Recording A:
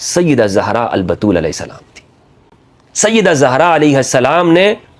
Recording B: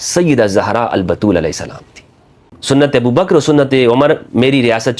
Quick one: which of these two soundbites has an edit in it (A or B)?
B